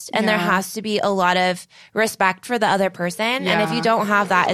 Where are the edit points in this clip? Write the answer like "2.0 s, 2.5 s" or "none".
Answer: none